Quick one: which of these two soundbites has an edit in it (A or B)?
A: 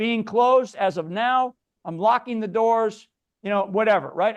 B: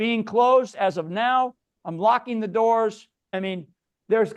B